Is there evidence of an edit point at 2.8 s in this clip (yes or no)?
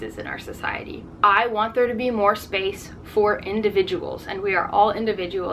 no